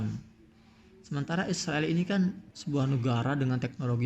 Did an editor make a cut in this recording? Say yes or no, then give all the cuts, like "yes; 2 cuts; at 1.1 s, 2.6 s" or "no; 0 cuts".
yes; 1 cut; at 2.5 s